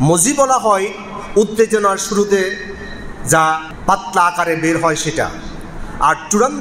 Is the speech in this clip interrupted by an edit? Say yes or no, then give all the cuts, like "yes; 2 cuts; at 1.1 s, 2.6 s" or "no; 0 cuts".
yes; 1 cut; at 3.7 s